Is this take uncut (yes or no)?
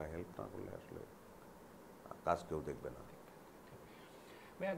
yes